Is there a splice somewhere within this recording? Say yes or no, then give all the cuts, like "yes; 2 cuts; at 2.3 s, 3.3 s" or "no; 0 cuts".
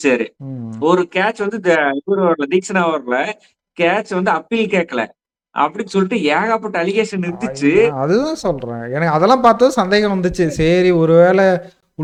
no; 0 cuts